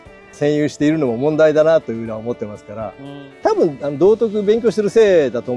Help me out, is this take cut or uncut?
cut